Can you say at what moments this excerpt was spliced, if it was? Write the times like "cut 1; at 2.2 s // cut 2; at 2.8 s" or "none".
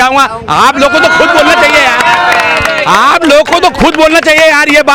none